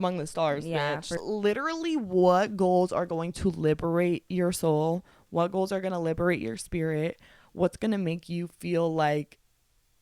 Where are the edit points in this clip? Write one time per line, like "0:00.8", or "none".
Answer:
0:01.0